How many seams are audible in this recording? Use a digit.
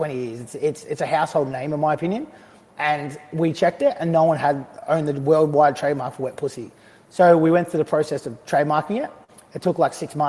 0